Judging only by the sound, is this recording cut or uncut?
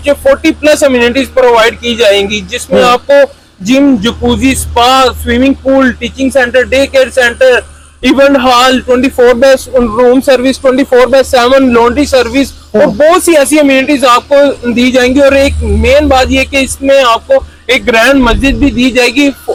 uncut